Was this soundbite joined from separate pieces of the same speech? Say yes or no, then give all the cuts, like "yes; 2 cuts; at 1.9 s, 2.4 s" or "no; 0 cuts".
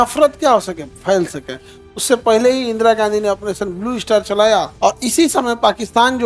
yes; 1 cut; at 4.7 s